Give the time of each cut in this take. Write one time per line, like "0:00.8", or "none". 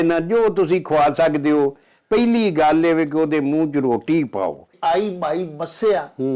0:04.7